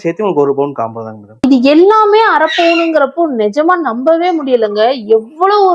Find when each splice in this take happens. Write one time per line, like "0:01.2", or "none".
0:01.4